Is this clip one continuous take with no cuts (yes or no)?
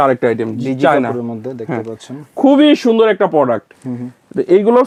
yes